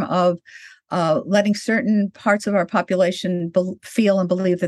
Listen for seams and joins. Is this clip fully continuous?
yes; 0 cuts

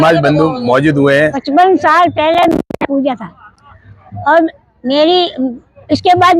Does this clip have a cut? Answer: yes; 1 cut; at 1.4 s

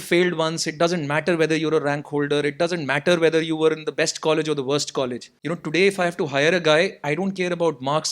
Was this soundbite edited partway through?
yes; 1 cut; at 5.3 s

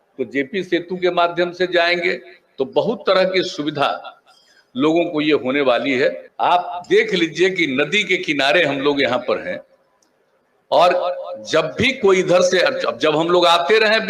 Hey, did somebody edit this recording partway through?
yes; 1 cut; at 6.3 s

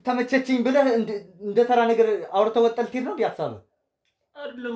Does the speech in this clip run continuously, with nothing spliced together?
yes; 0 cuts

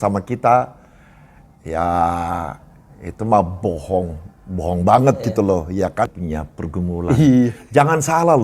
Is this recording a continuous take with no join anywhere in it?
no; 1 cut; at 6.2 s

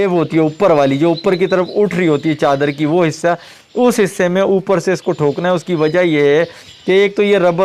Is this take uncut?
yes; 0 cuts

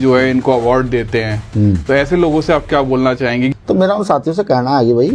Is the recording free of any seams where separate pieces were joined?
no; 1 cut; at 3.5 s

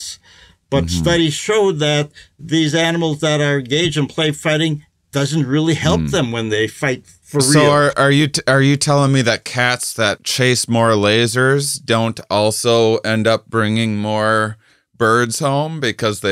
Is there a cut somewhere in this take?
yes; 2 cuts; at 7.4 s, 10.2 s

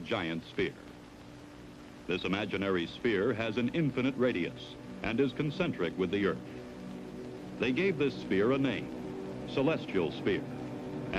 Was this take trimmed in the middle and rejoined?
yes; 1 cut; at 3.8 s

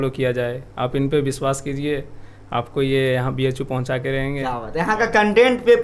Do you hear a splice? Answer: yes; 1 cut; at 4.6 s

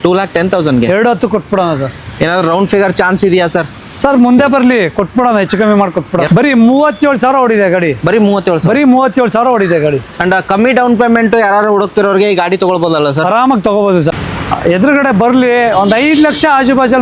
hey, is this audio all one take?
no; 2 cuts; at 6.3 s, 14.1 s

